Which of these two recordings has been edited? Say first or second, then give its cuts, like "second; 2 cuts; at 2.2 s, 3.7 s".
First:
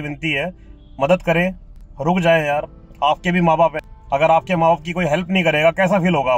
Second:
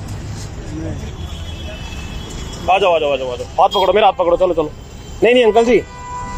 first; 1 cut; at 3.9 s